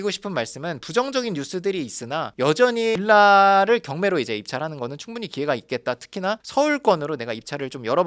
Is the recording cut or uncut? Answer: uncut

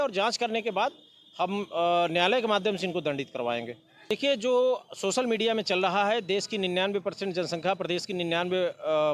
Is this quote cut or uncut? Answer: cut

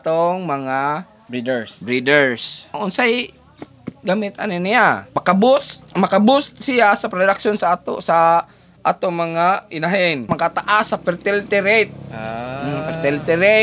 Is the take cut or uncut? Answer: cut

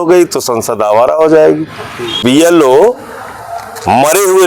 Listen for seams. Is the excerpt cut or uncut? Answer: cut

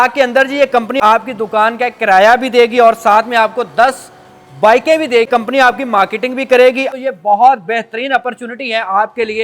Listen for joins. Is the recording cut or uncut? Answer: cut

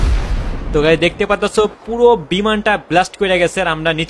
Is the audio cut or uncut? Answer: uncut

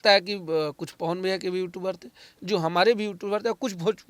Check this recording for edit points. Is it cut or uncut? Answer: uncut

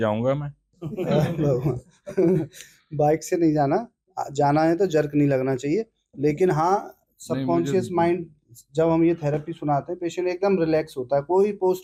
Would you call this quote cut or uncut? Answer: uncut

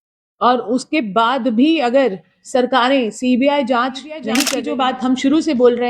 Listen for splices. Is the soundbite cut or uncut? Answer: cut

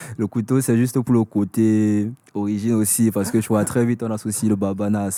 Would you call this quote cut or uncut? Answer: uncut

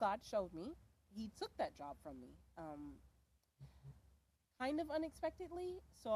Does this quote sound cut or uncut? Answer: uncut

